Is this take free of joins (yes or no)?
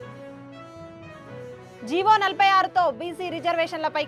no